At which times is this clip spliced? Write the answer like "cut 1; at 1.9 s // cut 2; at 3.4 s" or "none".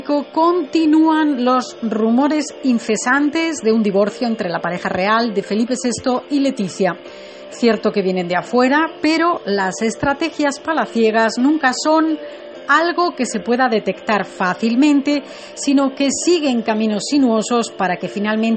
none